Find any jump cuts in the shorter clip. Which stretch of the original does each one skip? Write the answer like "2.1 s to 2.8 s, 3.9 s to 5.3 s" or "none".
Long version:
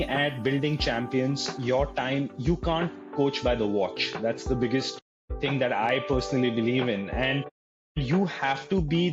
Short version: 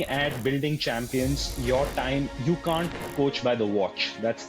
none